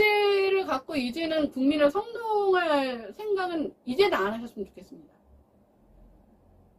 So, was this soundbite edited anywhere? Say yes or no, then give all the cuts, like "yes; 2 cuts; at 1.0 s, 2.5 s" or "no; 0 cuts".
no; 0 cuts